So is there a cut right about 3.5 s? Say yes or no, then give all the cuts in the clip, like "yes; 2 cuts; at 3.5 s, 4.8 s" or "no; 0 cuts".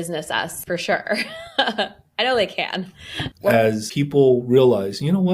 yes; 1 cut; at 3.5 s